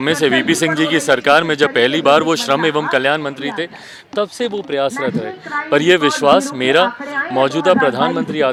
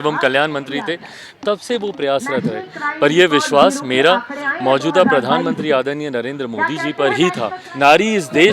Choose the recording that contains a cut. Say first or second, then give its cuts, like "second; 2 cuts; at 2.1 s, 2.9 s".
second; 1 cut; at 7.6 s